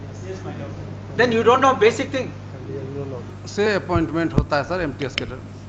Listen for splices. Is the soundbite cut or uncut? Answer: cut